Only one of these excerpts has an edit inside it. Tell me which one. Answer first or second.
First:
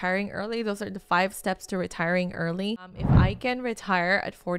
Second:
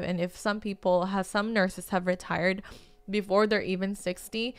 first